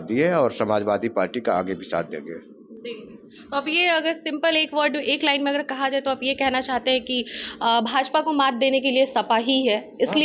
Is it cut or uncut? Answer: uncut